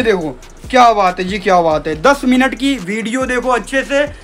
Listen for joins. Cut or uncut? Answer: uncut